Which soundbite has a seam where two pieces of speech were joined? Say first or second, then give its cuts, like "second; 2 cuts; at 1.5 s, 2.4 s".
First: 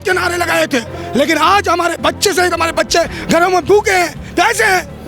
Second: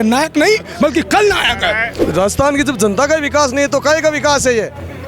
second; 1 cut; at 1.9 s